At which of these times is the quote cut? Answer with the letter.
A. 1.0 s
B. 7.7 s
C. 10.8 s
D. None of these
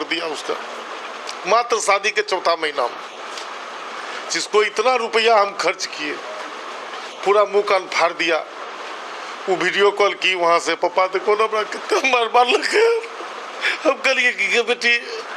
D